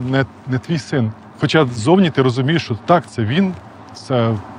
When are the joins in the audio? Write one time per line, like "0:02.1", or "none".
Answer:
0:01.2